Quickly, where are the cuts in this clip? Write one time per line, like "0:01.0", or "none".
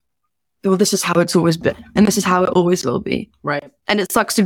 0:01.9